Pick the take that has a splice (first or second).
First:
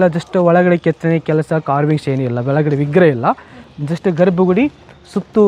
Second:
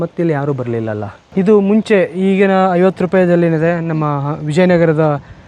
second